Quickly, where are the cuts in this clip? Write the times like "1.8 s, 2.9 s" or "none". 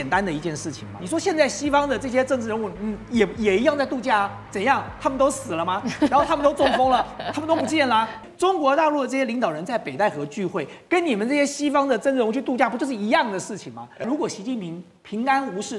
1.0 s, 8.3 s, 14.0 s